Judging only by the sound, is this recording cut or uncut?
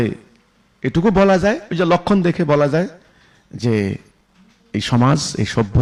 uncut